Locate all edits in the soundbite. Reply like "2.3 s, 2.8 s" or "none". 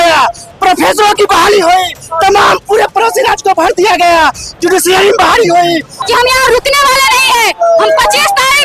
6.0 s